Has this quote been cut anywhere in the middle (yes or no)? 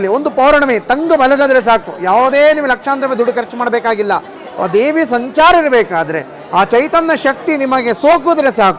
no